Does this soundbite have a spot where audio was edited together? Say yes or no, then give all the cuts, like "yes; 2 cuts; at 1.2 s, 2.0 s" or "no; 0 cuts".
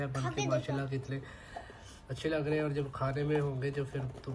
no; 0 cuts